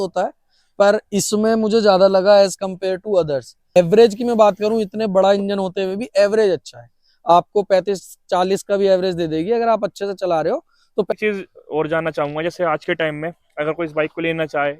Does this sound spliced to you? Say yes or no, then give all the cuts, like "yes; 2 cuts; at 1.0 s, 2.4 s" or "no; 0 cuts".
yes; 2 cuts; at 3.8 s, 11.1 s